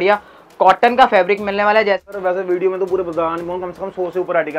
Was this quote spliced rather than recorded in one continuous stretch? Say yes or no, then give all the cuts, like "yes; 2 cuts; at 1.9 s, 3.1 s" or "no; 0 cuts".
yes; 1 cut; at 2.0 s